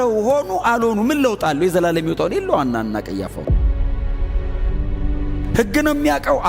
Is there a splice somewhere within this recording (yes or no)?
no